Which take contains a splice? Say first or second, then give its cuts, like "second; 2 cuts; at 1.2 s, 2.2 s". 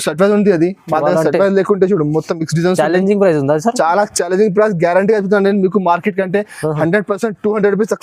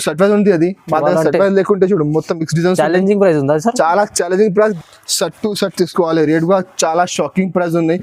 second; 1 cut; at 4.8 s